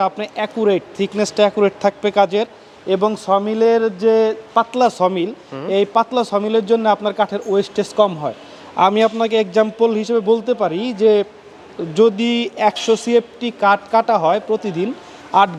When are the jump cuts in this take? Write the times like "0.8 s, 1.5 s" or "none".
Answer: none